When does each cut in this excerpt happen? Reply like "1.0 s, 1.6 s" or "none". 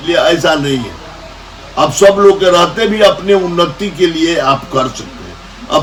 none